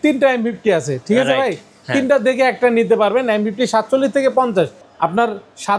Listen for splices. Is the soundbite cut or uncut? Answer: cut